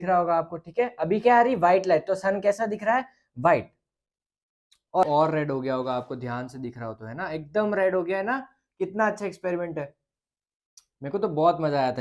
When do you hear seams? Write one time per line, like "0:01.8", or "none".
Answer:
0:05.0